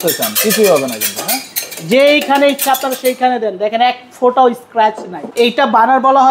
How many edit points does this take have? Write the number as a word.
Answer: one